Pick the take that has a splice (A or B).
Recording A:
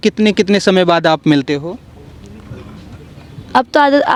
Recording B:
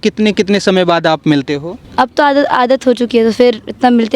B